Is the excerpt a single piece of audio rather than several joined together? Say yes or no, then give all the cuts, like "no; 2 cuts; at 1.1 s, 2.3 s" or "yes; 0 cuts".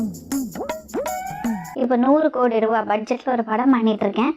yes; 0 cuts